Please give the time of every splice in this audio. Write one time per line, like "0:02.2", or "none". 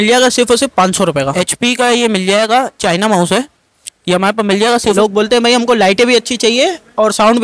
0:01.3
0:04.9